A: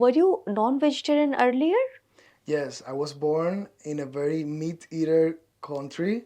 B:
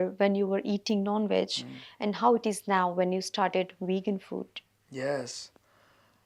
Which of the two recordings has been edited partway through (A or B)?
A